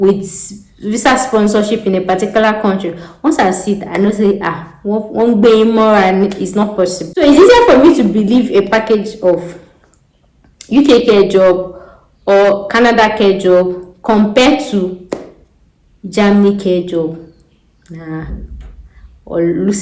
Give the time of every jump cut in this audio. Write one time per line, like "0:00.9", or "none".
0:07.0